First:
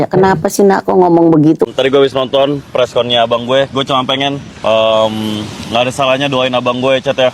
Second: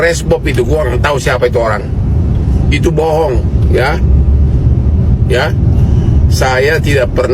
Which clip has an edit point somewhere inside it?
first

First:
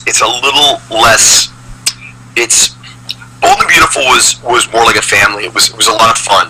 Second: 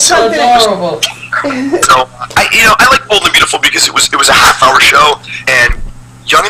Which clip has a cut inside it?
first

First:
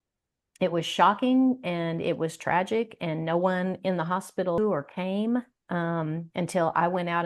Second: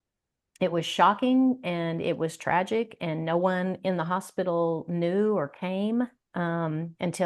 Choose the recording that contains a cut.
first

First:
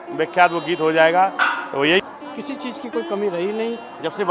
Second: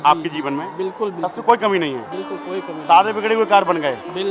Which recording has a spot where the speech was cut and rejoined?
first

